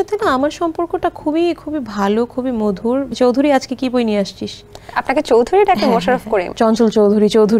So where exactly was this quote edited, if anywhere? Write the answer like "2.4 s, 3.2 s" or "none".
3.1 s, 6.5 s